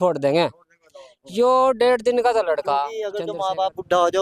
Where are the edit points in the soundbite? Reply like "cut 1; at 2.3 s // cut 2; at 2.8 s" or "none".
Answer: cut 1; at 3.1 s